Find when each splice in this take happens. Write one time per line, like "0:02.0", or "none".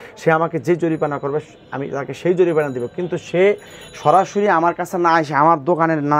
none